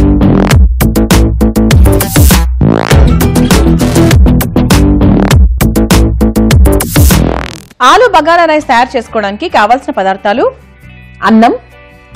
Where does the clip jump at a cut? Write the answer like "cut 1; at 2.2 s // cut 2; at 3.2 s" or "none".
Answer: cut 1; at 7.7 s